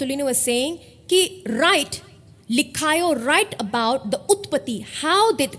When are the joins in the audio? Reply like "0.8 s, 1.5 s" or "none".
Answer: none